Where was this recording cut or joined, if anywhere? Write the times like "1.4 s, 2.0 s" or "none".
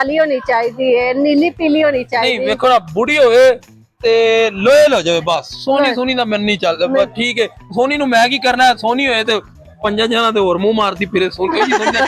none